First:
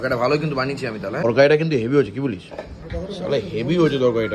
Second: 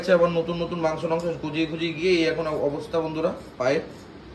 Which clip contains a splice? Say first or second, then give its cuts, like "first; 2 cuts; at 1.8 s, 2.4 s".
first; 1 cut; at 1.2 s